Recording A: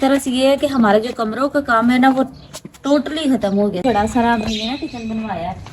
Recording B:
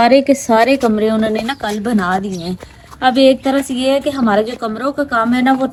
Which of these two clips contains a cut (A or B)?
A